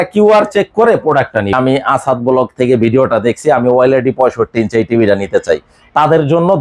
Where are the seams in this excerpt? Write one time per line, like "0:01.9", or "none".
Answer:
0:01.5